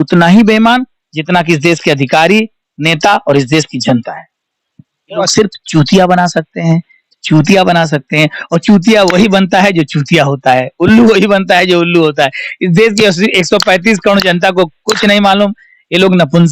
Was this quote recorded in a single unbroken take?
no; 1 cut; at 5.3 s

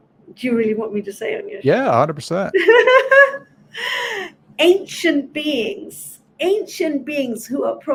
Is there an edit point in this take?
no; 0 cuts

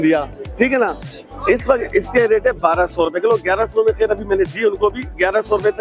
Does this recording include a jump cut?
no; 0 cuts

